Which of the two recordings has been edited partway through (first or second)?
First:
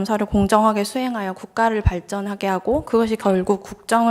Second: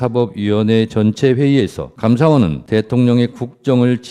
second